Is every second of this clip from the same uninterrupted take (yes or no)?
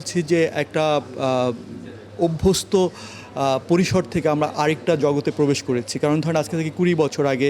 yes